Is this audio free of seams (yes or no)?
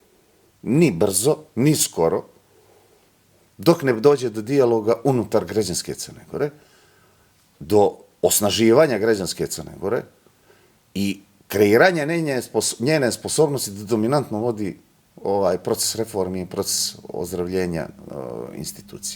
yes